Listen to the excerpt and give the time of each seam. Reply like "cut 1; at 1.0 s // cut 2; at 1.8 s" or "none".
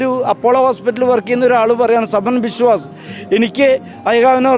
none